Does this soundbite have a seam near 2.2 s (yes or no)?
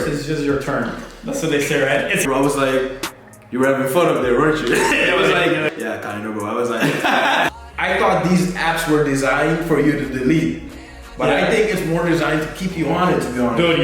yes